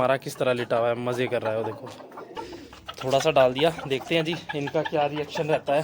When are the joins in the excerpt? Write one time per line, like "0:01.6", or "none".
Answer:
0:02.3